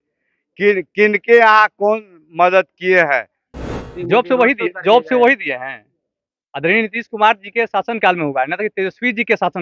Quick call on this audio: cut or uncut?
cut